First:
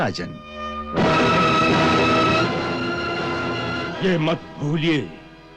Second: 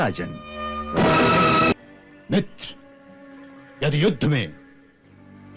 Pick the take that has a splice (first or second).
second